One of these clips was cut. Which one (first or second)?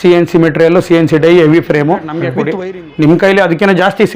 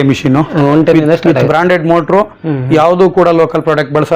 first